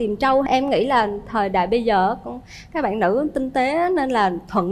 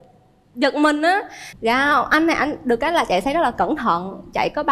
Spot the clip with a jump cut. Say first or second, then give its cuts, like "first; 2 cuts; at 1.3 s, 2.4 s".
second; 1 cut; at 1.4 s